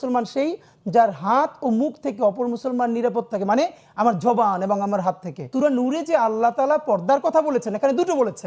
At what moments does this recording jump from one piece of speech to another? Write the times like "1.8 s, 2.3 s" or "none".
5.5 s